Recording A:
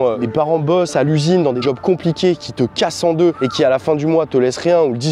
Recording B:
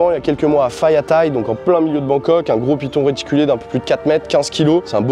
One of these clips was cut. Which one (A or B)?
A